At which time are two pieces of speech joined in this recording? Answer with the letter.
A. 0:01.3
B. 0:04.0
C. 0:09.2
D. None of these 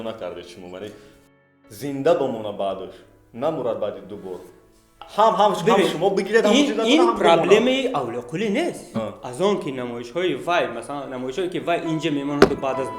A